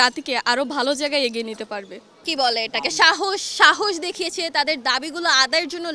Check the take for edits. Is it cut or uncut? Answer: cut